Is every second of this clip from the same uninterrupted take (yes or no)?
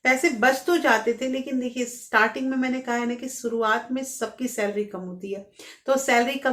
yes